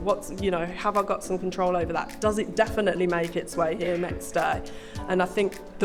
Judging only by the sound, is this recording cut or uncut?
uncut